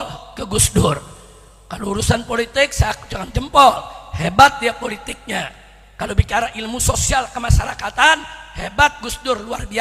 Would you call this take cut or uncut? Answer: uncut